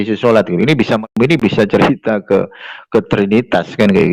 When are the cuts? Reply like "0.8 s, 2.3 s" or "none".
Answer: 1.1 s